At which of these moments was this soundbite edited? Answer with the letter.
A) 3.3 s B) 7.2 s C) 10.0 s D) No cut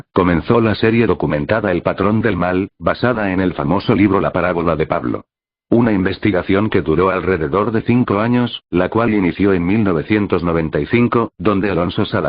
B